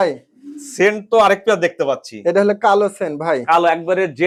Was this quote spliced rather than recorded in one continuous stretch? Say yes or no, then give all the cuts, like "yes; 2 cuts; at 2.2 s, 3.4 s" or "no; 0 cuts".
no; 0 cuts